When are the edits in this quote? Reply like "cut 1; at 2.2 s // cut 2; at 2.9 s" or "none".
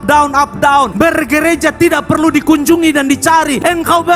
cut 1; at 0.9 s